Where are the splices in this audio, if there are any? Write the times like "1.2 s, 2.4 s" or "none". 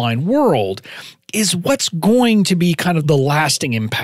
3.0 s